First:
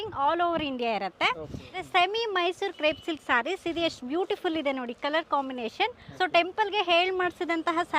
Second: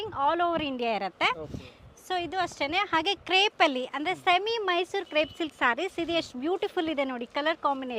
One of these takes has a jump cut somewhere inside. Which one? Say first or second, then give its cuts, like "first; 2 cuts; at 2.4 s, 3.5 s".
first; 2 cuts; at 1.8 s, 6.0 s